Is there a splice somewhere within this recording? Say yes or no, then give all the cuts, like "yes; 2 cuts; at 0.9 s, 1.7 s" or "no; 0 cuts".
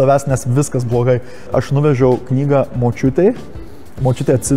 yes; 1 cut; at 1.5 s